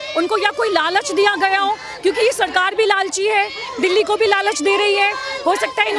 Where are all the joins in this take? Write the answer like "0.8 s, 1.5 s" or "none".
none